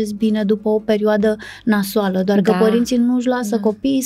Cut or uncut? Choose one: uncut